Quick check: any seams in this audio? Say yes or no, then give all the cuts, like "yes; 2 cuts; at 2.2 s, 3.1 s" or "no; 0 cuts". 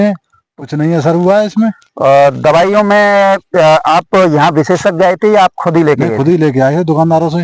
no; 0 cuts